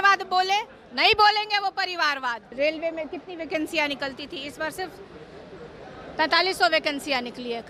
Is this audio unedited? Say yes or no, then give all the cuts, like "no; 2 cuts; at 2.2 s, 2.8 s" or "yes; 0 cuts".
no; 1 cut; at 2.5 s